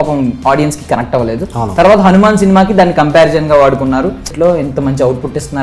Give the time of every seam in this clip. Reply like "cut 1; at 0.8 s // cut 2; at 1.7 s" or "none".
cut 1; at 4.3 s